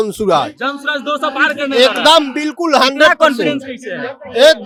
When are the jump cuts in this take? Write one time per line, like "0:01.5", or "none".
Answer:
none